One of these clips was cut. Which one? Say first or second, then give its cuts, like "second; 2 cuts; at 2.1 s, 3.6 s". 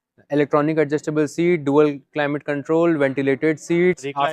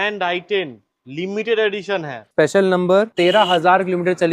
second; 2 cuts; at 2.2 s, 3.1 s